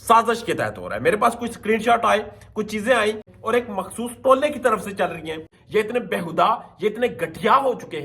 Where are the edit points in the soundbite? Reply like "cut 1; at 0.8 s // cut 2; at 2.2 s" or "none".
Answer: cut 1; at 3.3 s // cut 2; at 5.5 s